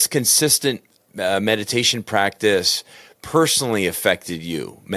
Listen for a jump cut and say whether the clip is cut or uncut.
uncut